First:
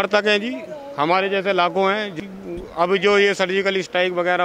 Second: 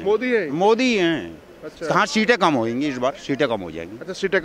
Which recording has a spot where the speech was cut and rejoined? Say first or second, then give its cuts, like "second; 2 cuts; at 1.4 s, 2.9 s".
first; 1 cut; at 2.2 s